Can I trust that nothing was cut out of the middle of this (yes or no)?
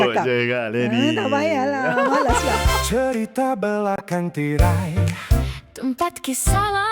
no